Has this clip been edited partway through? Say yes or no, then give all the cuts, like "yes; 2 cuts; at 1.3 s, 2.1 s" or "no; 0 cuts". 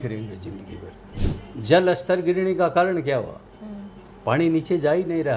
yes; 1 cut; at 1.2 s